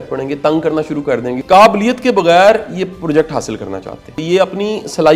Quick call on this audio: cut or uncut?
cut